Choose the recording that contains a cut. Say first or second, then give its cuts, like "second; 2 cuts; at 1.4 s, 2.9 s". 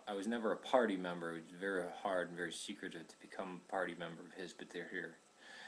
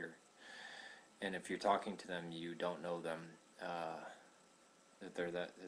first; 1 cut; at 4.0 s